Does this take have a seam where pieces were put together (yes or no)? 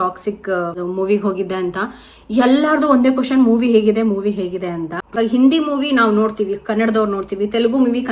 yes